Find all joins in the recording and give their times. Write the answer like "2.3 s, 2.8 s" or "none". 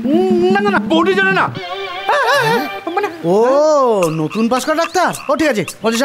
3.2 s